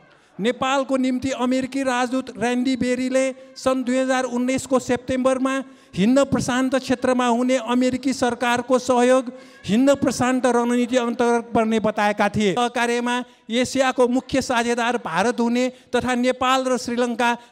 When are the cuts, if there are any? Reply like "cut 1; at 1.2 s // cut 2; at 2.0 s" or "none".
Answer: cut 1; at 12.6 s

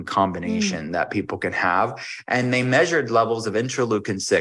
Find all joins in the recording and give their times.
none

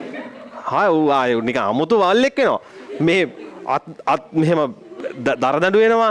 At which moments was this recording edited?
none

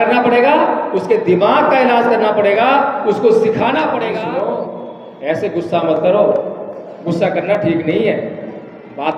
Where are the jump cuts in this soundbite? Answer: cut 1; at 4.1 s

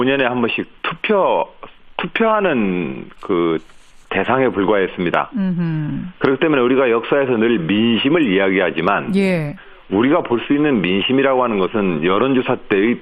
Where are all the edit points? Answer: none

